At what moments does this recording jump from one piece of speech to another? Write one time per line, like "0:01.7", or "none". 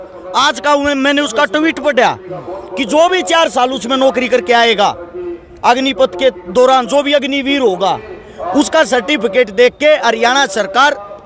none